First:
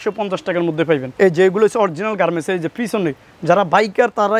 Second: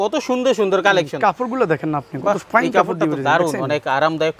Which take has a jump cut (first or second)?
first